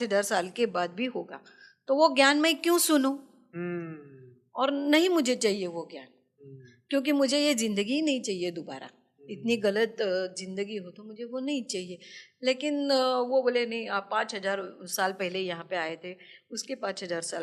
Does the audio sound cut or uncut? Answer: uncut